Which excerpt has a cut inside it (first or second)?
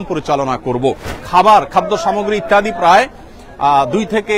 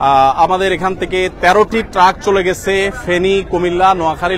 first